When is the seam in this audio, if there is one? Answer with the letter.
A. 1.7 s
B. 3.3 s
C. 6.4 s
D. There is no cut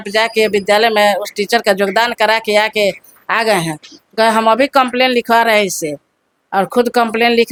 D